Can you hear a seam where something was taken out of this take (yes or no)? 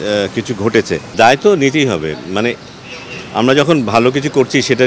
yes